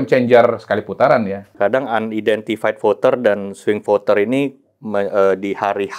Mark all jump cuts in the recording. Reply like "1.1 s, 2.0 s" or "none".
1.4 s